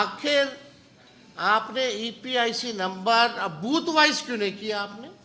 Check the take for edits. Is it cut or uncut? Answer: uncut